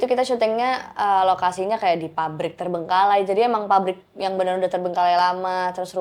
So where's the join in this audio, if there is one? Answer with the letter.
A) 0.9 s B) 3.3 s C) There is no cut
C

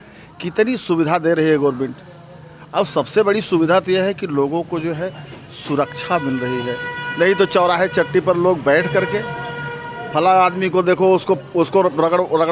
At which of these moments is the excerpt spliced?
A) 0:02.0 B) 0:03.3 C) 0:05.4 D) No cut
D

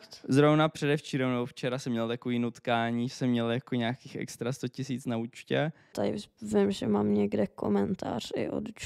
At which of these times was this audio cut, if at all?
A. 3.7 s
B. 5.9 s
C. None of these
B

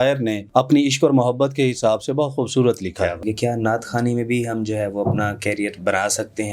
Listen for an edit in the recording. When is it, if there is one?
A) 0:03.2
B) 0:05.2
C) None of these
A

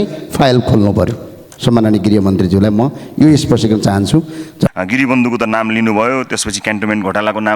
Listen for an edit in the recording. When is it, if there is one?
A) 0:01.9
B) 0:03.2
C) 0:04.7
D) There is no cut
C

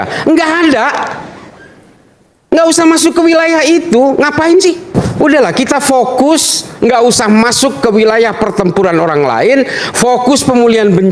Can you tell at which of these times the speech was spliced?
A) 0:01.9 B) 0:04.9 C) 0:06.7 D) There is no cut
B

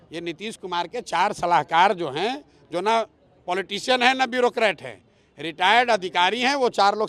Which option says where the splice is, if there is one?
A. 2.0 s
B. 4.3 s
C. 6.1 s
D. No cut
D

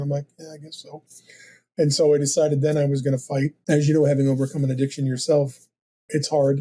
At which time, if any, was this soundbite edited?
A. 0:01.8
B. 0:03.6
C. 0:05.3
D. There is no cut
B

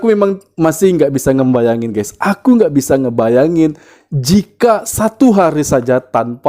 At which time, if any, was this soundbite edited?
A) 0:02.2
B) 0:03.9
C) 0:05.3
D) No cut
D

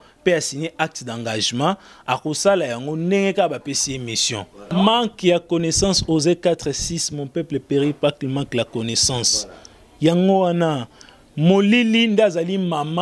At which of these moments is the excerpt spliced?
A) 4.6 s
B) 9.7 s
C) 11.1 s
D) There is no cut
A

